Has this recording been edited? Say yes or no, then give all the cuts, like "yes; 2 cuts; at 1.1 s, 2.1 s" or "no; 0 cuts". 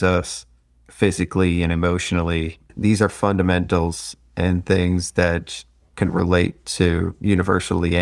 yes; 1 cut; at 2.7 s